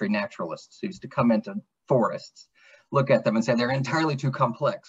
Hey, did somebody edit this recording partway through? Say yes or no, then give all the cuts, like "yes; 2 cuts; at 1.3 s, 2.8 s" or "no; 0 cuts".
no; 0 cuts